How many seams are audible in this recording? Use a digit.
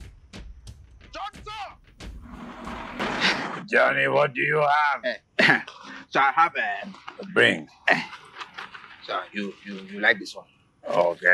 1